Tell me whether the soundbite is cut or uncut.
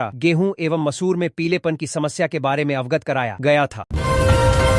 cut